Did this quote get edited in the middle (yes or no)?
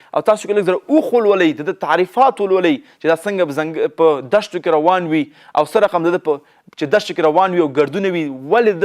no